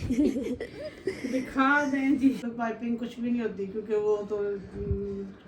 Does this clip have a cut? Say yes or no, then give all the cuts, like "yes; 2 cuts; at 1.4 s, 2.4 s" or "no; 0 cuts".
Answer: yes; 1 cut; at 2.4 s